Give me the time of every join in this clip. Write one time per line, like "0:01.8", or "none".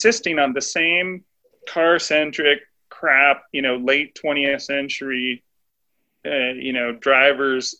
none